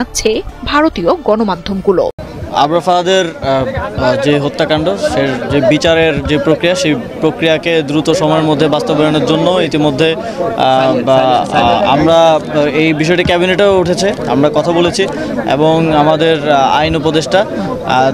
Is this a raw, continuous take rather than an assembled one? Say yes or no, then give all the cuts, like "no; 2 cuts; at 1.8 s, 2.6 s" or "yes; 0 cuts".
no; 1 cut; at 2.2 s